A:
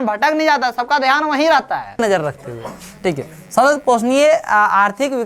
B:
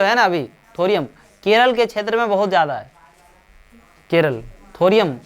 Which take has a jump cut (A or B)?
A